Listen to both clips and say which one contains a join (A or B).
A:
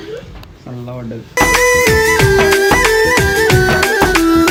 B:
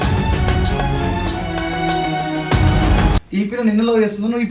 B